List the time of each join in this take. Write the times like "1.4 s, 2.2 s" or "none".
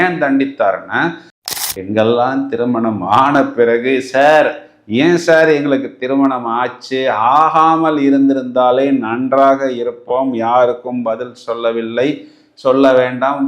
1.3 s